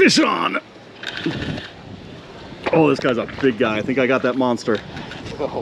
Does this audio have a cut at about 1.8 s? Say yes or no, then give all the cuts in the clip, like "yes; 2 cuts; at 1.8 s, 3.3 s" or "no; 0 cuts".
no; 0 cuts